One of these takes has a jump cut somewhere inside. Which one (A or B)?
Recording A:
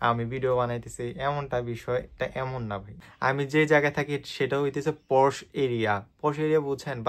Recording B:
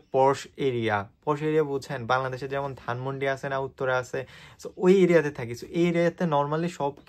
A